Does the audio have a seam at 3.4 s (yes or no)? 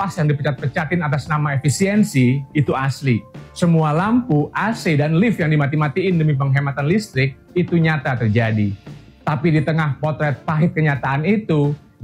no